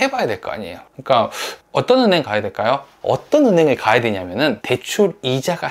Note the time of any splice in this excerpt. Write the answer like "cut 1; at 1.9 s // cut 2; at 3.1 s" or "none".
cut 1; at 2.9 s // cut 2; at 4.8 s